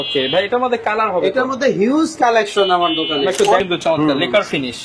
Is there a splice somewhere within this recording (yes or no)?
yes